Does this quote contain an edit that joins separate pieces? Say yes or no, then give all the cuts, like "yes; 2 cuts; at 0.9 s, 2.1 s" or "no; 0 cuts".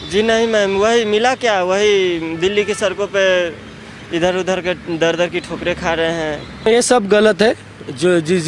yes; 1 cut; at 6.7 s